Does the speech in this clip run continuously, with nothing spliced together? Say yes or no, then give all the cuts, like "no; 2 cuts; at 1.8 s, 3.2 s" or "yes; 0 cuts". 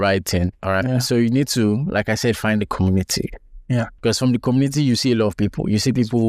no; 1 cut; at 3.9 s